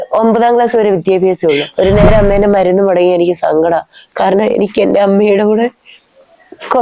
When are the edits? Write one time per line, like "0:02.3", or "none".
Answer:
0:01.7